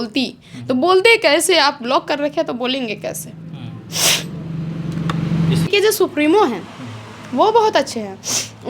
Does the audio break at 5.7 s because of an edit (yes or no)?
yes